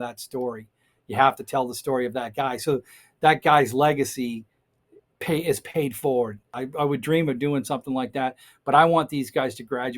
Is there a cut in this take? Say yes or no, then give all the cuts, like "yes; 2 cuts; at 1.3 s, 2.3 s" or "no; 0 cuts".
yes; 1 cut; at 6.4 s